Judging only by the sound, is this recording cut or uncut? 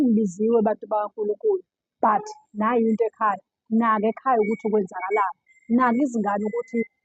uncut